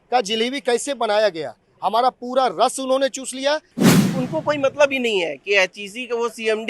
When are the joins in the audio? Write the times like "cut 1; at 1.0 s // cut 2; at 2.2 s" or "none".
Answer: cut 1; at 3.7 s